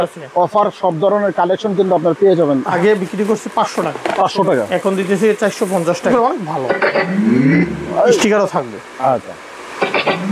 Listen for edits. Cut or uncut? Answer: cut